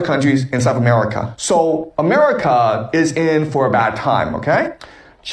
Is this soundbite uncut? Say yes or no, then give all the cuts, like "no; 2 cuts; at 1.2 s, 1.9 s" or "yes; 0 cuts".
no; 1 cut; at 4.4 s